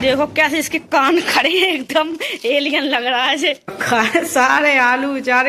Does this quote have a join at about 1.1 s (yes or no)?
no